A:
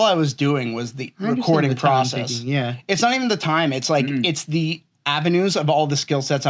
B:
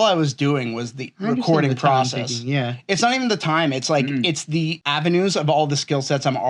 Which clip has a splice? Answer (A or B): B